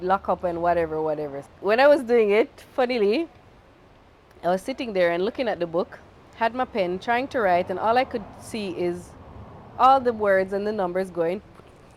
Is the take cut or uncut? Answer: cut